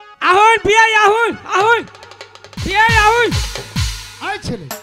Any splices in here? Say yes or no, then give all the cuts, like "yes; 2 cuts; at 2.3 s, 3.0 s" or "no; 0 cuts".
no; 0 cuts